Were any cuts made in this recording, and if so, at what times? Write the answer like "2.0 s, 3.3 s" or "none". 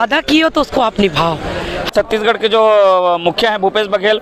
1.9 s